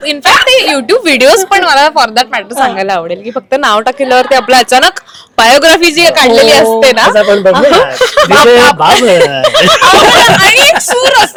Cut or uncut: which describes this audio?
uncut